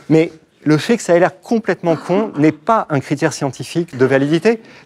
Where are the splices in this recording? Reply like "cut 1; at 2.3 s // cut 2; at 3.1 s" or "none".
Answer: cut 1; at 3.9 s